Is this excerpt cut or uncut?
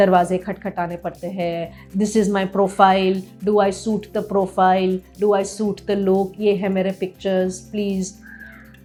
uncut